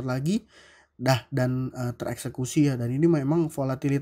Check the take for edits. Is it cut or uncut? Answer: uncut